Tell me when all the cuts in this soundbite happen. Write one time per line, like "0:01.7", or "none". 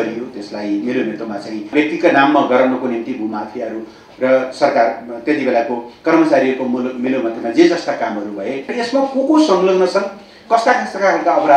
0:01.7
0:08.8